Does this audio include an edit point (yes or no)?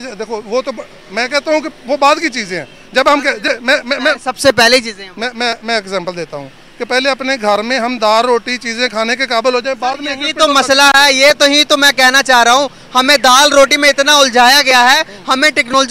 no